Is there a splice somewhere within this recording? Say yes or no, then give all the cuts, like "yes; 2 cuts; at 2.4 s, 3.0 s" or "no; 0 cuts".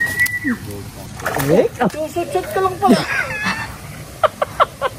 yes; 2 cuts; at 1.0 s, 2.0 s